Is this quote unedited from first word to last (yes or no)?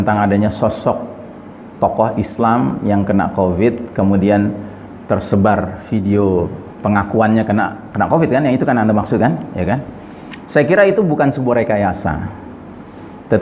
yes